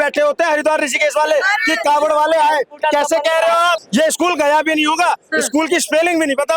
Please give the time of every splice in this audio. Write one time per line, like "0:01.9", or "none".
0:03.8